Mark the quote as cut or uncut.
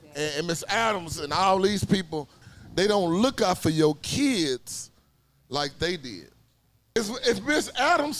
cut